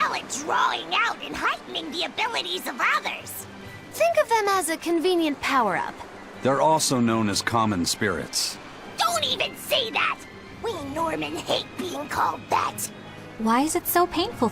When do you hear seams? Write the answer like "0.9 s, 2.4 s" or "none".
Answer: 11.7 s

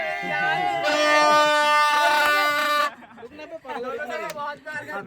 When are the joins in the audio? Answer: 1.5 s

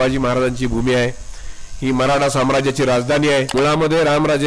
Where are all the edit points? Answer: 3.5 s

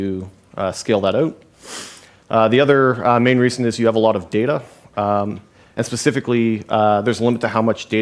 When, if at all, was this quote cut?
none

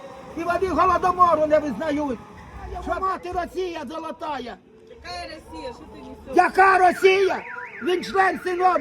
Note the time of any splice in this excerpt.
2.9 s

